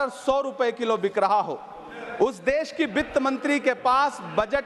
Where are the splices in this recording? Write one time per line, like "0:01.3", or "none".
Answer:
none